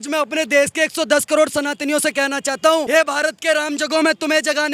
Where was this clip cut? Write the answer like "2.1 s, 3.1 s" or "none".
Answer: 2.9 s